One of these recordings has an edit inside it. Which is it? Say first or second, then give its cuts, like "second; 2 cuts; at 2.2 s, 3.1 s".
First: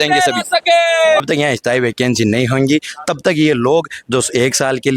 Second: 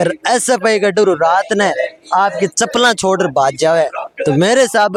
first; 1 cut; at 1.2 s